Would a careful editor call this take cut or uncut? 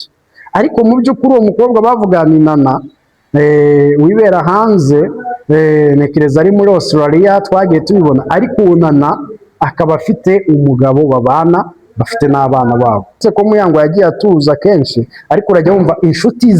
cut